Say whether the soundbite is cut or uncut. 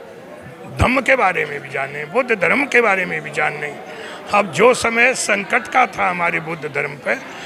uncut